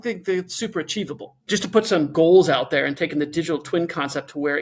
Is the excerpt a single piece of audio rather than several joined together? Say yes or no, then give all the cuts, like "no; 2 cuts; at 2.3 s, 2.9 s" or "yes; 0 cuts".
no; 1 cut; at 2.1 s